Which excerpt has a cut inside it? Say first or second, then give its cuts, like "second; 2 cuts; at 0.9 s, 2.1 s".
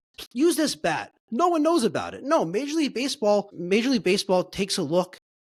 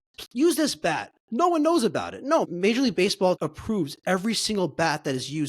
second; 2 cuts; at 2.5 s, 3.4 s